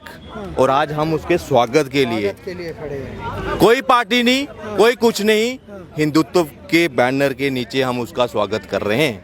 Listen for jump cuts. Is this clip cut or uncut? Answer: uncut